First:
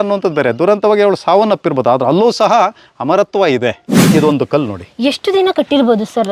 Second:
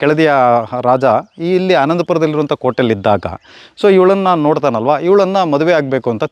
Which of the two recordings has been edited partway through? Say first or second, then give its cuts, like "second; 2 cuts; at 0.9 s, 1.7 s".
first; 1 cut; at 4.0 s